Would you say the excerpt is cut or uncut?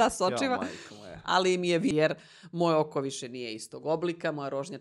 cut